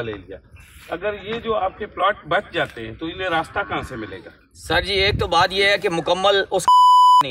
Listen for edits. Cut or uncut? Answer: uncut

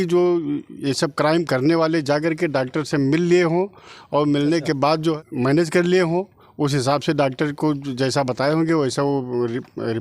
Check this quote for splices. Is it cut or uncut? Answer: cut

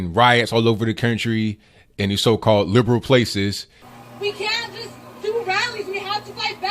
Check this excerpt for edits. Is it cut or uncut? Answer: cut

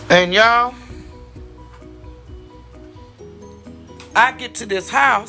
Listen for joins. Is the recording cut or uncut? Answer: cut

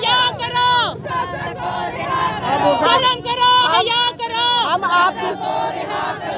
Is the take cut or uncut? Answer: uncut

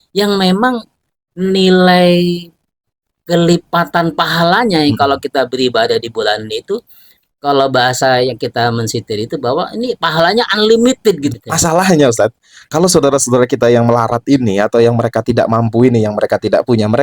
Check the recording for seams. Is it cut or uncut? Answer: cut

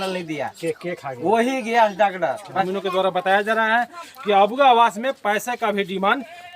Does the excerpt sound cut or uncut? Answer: cut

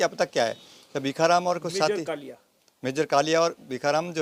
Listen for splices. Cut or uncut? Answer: uncut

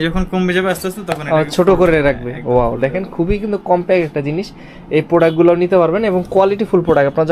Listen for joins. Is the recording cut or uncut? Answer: uncut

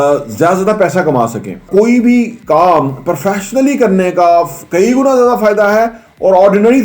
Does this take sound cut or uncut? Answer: cut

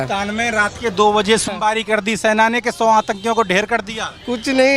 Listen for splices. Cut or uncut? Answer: cut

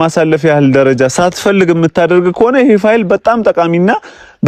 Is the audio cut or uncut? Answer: uncut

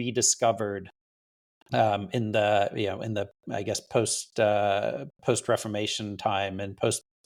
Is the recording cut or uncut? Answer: uncut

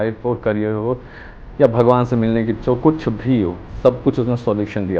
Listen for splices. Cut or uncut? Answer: uncut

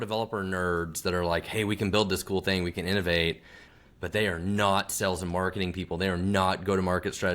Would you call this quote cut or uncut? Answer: cut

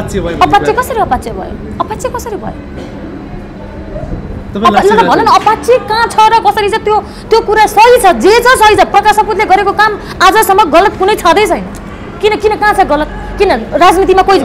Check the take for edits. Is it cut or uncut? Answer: uncut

